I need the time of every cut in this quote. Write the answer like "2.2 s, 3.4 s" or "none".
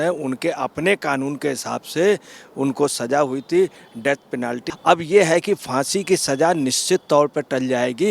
4.7 s